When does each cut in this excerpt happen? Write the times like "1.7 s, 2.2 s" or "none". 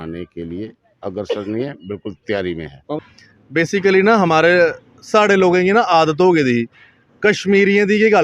3.0 s